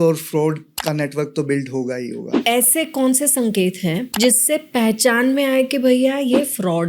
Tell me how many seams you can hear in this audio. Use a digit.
2